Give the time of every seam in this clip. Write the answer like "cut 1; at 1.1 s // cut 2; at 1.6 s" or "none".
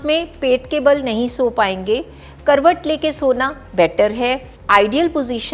cut 1; at 4.5 s

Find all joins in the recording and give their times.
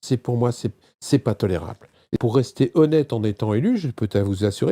cut 1; at 2.2 s

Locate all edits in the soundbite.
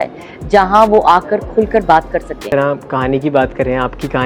cut 1; at 2.4 s

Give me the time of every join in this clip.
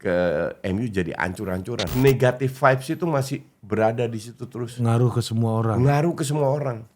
cut 1; at 1.9 s

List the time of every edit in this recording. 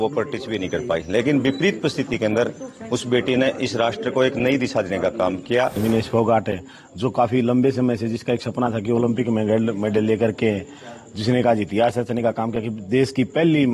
cut 1; at 5.8 s

